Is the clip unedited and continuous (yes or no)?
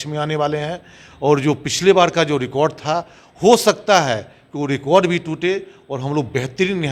yes